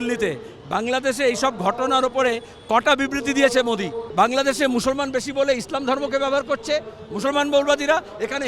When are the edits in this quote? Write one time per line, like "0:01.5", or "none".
0:04.0